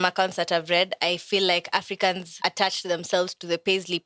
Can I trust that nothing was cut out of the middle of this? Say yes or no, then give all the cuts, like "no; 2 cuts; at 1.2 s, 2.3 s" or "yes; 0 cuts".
no; 1 cut; at 2.3 s